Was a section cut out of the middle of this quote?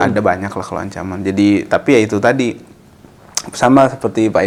no; 0 cuts

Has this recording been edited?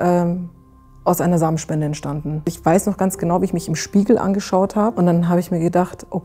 yes; 2 cuts; at 2.6 s, 4.9 s

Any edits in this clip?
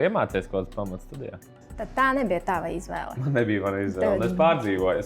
yes; 1 cut; at 1.6 s

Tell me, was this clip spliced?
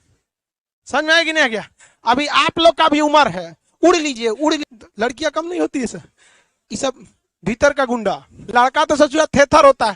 yes; 2 cuts; at 4.7 s, 8.3 s

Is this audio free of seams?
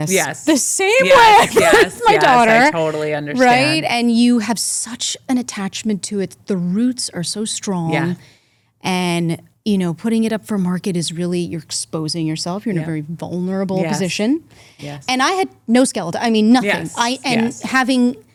yes; 0 cuts

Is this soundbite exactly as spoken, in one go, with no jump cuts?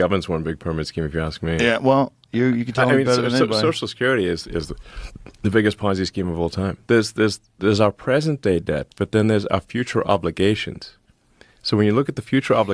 no; 1 cut; at 6.8 s

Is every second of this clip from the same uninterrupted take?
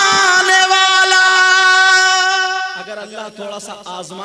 no; 1 cut; at 2.8 s

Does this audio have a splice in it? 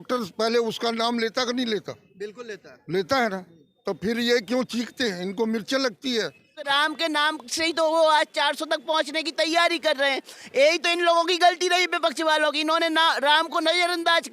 yes; 1 cut; at 6.7 s

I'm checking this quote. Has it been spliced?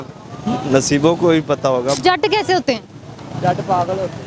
yes; 1 cut; at 2.0 s

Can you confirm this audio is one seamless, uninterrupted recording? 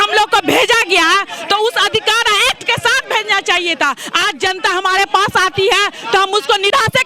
yes; 0 cuts

